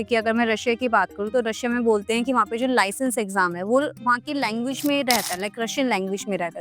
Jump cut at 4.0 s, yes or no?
no